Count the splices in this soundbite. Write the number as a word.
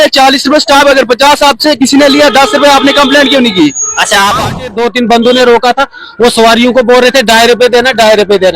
one